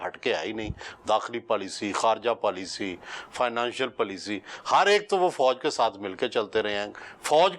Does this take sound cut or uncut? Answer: uncut